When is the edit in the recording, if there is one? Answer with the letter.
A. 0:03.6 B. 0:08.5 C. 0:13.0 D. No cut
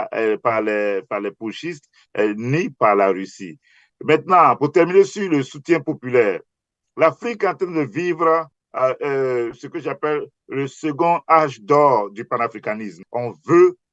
C